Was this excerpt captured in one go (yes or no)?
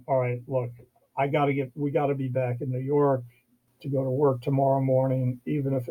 yes